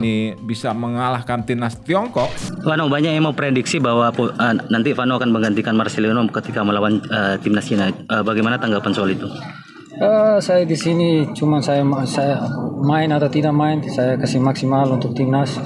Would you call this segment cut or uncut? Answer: cut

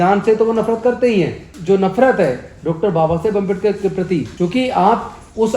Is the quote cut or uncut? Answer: cut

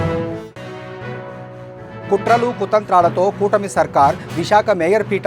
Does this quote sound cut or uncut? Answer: cut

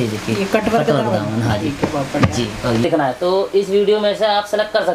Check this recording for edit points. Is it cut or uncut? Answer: cut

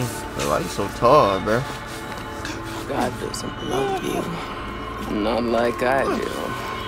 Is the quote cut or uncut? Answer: uncut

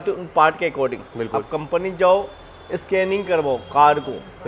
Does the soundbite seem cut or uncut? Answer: uncut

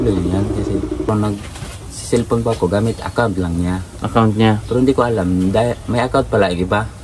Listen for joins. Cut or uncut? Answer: cut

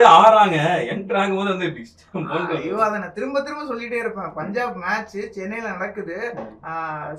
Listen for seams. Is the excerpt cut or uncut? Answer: uncut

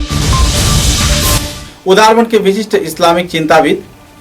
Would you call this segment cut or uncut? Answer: uncut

